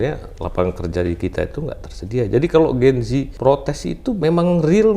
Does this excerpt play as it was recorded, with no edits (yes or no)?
no